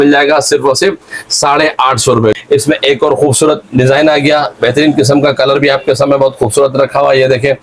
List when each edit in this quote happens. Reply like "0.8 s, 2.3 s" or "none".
2.3 s